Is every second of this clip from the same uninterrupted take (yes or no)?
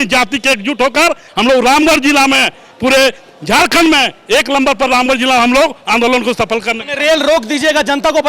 yes